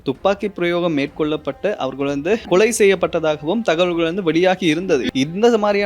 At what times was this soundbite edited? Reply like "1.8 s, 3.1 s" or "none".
2.4 s, 5.1 s